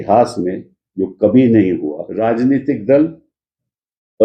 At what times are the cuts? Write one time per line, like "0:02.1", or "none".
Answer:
0:02.1